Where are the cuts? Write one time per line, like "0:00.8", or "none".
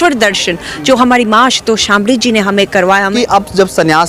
0:03.1